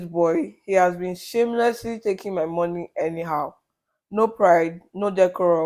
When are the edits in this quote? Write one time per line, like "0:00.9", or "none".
none